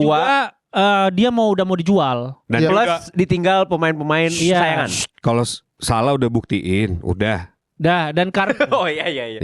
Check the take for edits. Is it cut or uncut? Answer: uncut